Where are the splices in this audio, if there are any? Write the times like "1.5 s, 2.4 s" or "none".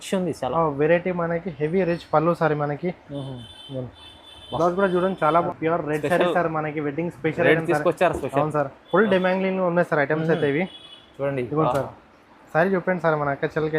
5.4 s